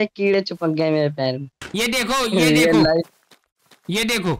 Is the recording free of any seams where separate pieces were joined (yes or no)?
no